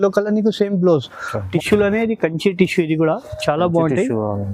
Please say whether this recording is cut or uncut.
cut